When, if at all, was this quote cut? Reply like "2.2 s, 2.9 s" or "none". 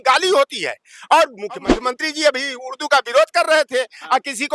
1.7 s

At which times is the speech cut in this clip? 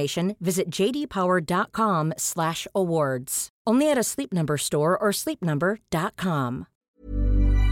6.8 s

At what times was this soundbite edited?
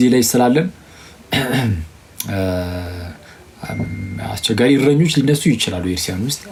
none

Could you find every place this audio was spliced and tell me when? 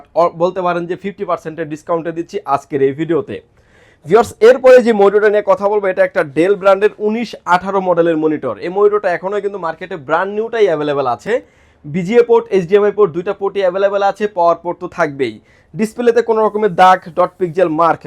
none

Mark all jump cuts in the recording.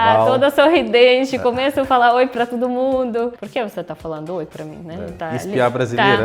5.2 s

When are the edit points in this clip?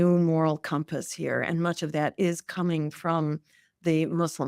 none

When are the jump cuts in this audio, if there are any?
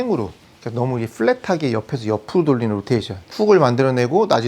3.2 s

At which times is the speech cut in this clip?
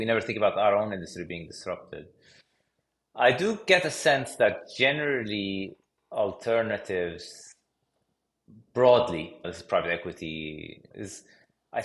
none

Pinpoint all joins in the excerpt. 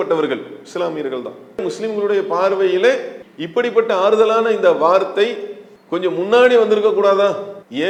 none

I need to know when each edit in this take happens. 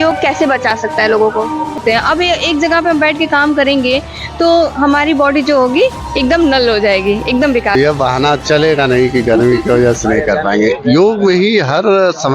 1.8 s, 7.8 s

